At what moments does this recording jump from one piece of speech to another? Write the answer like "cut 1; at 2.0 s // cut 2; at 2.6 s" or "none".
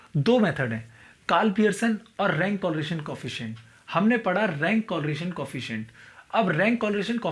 none

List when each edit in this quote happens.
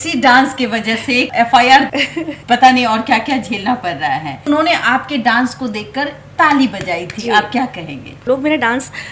cut 1; at 1.9 s // cut 2; at 4.5 s // cut 3; at 8.2 s

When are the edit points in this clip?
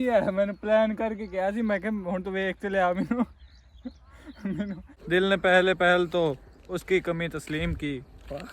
cut 1; at 4.9 s

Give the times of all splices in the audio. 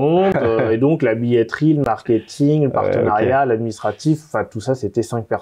none

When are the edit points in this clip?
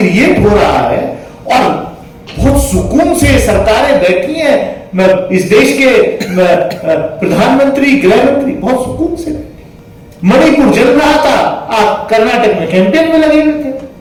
none

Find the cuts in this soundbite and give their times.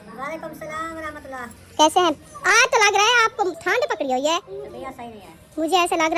cut 1; at 2.3 s // cut 2; at 3.6 s // cut 3; at 4.5 s

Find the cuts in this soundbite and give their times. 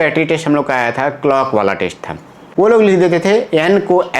cut 1; at 2.4 s

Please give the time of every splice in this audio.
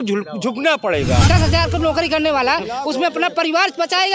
cut 1; at 1.2 s

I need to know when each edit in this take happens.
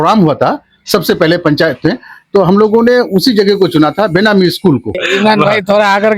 cut 1; at 5.0 s

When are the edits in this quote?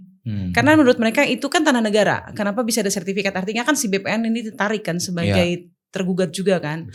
none

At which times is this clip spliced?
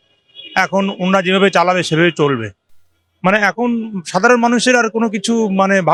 none

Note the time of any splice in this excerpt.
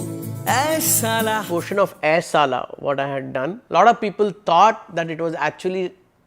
cut 1; at 1.4 s // cut 2; at 3.6 s

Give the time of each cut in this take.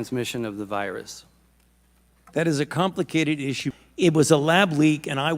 cut 1; at 3.6 s

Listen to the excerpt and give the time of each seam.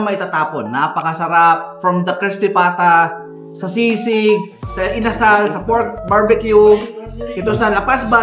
none

